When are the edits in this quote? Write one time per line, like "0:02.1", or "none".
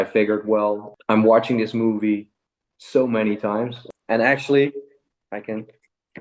0:03.8